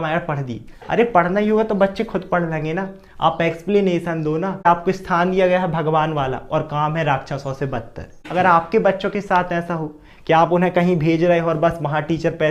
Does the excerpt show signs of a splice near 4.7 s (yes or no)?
yes